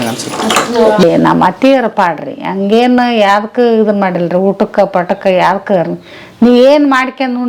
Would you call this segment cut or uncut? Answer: cut